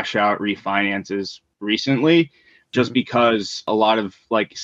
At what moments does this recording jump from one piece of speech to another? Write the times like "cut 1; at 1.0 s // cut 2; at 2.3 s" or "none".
cut 1; at 2.7 s // cut 2; at 3.7 s